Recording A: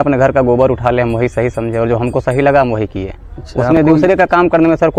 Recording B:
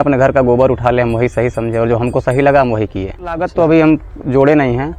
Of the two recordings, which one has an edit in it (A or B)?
B